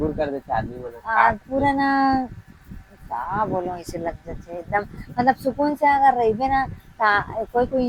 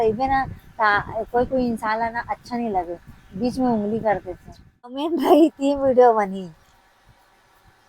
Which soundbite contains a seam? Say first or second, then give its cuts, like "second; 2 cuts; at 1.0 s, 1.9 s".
second; 1 cut; at 5.1 s